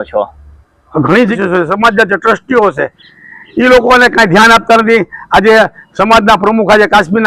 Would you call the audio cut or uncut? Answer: cut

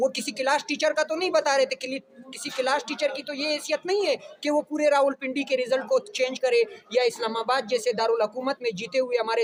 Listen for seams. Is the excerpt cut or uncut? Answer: uncut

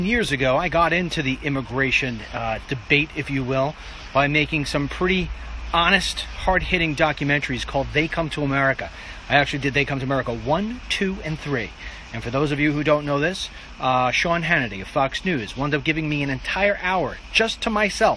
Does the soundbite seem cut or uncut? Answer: uncut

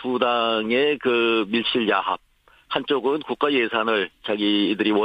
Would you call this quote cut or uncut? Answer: uncut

